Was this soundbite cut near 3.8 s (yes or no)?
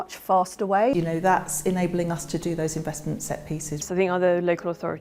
yes